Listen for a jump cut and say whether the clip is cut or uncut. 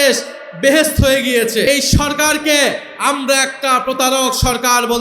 cut